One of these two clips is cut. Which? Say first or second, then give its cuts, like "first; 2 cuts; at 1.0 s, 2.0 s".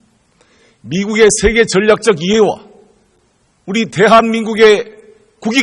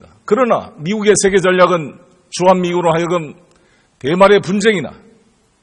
first; 1 cut; at 1.0 s